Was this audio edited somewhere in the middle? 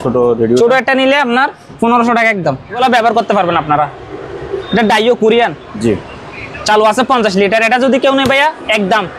yes; 1 cut; at 2.8 s

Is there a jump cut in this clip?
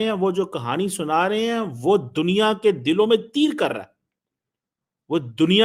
no; 0 cuts

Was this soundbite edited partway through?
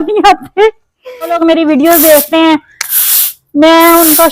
yes; 1 cut; at 1.3 s

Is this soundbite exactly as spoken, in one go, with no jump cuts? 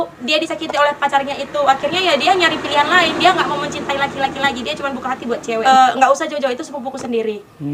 no; 1 cut; at 5.6 s

